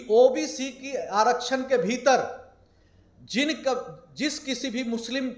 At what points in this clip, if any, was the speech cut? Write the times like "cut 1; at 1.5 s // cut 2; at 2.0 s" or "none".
none